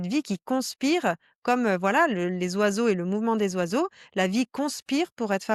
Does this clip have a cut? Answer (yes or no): no